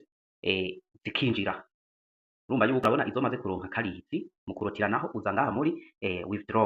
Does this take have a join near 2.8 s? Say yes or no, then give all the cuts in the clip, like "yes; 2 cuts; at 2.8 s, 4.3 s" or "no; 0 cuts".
yes; 1 cut; at 2.8 s